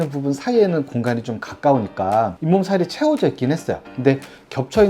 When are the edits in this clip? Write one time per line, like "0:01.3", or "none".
0:03.8